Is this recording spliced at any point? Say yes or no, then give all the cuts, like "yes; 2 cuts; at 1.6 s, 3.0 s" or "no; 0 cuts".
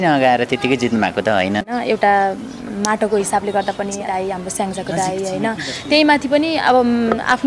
yes; 2 cuts; at 1.7 s, 4.0 s